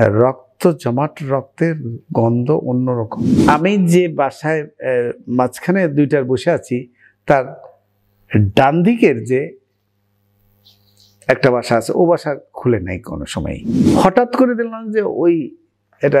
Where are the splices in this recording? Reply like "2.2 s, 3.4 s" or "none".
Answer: 3.2 s, 13.7 s